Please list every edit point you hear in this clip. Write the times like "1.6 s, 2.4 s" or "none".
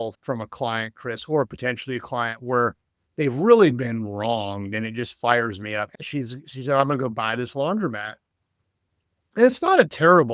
5.9 s